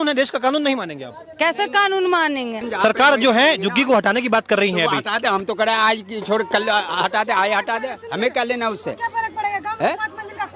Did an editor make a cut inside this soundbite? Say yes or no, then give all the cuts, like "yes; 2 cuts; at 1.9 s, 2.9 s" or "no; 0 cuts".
yes; 1 cut; at 2.6 s